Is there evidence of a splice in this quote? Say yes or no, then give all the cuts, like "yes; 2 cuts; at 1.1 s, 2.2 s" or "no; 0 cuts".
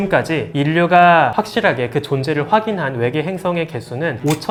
no; 0 cuts